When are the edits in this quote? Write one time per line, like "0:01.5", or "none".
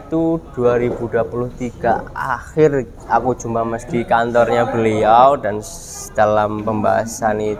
none